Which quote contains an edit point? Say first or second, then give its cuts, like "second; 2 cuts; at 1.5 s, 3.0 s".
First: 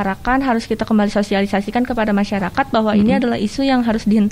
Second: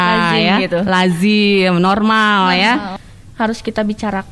second; 1 cut; at 3.0 s